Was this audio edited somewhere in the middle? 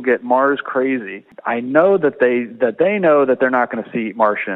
yes; 1 cut; at 1.3 s

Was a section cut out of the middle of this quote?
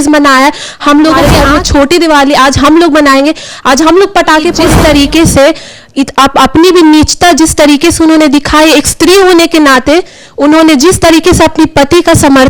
yes; 2 cuts; at 1.3 s, 4.7 s

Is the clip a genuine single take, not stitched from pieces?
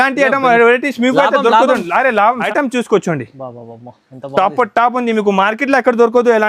no; 1 cut; at 2.4 s

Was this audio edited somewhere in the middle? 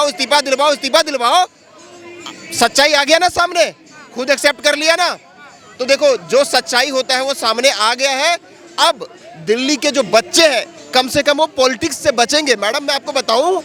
no; 0 cuts

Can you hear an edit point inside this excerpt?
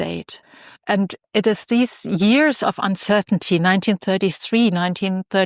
no; 0 cuts

